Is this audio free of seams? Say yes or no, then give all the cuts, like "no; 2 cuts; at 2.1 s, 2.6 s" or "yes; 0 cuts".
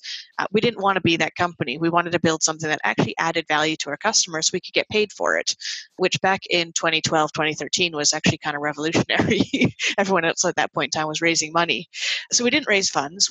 no; 2 cuts; at 6.0 s, 12.3 s